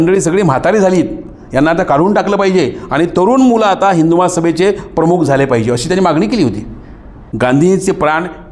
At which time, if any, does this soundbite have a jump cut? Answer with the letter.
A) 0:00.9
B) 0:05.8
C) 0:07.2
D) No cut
C